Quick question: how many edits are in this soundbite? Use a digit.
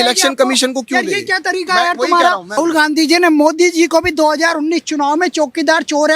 1